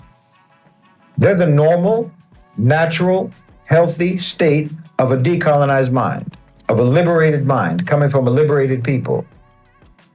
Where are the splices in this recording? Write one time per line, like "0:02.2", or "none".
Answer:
none